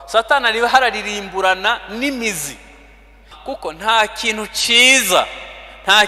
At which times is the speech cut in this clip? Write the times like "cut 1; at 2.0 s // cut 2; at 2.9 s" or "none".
cut 1; at 3.3 s